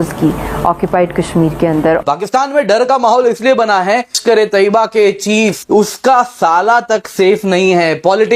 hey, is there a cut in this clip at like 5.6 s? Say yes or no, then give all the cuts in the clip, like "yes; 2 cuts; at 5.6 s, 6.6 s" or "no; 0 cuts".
yes; 3 cuts; at 2.0 s, 4.2 s, 5.6 s